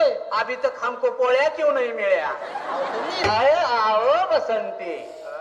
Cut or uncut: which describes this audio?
cut